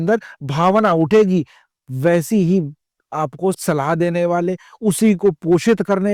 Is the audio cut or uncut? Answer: uncut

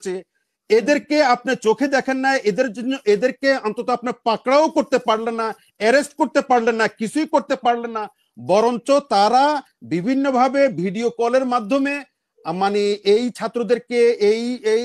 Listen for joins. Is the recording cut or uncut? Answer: uncut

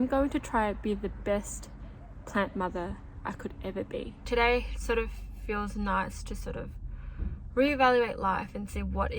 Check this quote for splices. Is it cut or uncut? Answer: cut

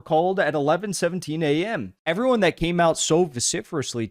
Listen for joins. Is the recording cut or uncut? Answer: cut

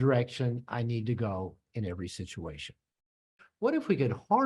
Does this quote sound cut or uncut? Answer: cut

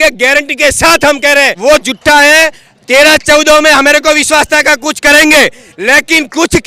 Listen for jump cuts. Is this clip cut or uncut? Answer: cut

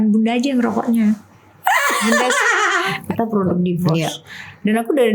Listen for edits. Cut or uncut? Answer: cut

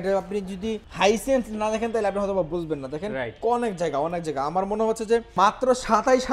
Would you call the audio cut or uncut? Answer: cut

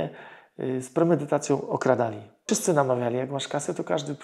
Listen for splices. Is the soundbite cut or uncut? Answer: cut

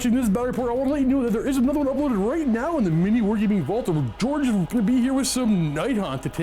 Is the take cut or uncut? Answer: cut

